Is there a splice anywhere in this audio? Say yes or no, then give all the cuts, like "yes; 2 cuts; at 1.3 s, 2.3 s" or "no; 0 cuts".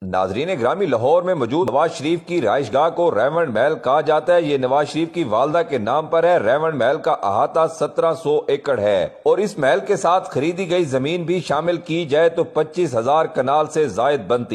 yes; 1 cut; at 1.7 s